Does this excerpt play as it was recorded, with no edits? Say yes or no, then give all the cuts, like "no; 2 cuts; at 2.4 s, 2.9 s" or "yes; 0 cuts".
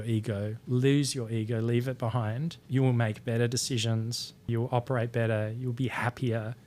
no; 2 cuts; at 2.6 s, 4.5 s